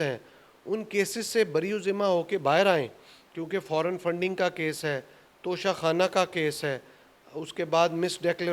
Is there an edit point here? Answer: no; 0 cuts

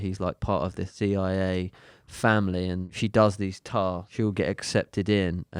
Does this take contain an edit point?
yes; 3 cuts; at 0.9 s, 2.9 s, 4.0 s

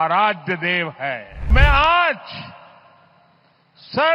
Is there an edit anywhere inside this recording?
yes; 1 cut; at 1.5 s

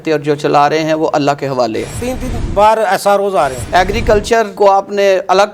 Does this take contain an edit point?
yes; 2 cuts; at 2.0 s, 3.6 s

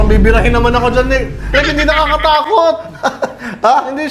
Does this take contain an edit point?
no; 0 cuts

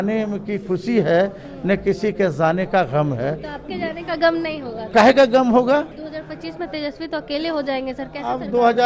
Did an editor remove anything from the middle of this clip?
yes; 2 cuts; at 4.8 s, 6.0 s

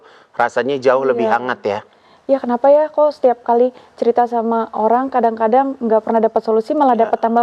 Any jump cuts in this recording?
no; 0 cuts

